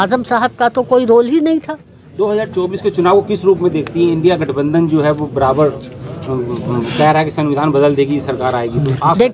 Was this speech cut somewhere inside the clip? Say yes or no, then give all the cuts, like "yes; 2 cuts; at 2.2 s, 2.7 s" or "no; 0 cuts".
no; 0 cuts